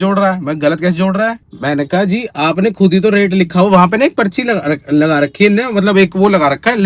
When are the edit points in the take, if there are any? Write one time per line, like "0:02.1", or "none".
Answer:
none